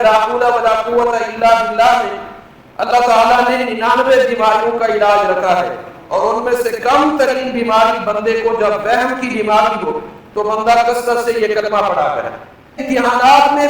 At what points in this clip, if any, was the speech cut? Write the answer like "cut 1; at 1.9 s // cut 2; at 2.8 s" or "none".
cut 1; at 12.8 s